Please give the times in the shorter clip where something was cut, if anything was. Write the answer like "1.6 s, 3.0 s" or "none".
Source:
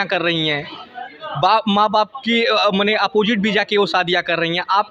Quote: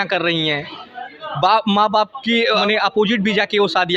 2.6 s